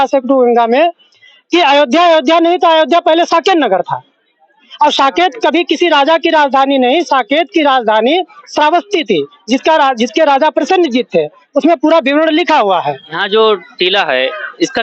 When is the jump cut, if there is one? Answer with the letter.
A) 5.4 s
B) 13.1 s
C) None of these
B